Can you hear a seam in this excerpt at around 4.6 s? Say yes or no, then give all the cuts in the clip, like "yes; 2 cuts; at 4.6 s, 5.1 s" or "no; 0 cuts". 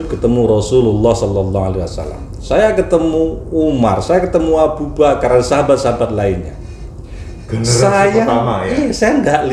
no; 0 cuts